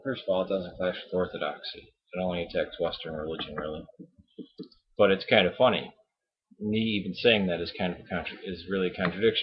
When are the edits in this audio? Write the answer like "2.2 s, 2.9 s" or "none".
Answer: 5.6 s